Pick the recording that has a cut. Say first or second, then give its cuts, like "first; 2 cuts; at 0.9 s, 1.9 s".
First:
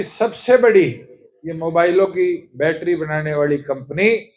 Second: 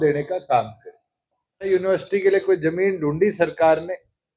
second; 1 cut; at 1.7 s